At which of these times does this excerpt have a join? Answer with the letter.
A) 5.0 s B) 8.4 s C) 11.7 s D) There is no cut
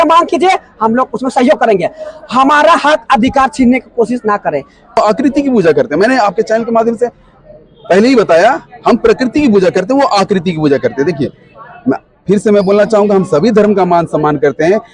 A